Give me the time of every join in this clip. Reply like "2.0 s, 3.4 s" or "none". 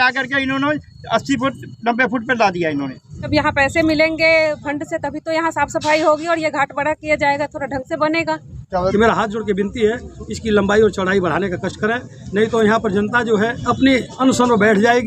3.3 s, 8.9 s, 13.6 s